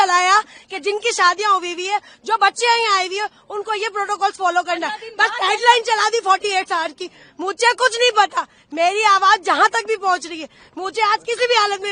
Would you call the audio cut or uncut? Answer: uncut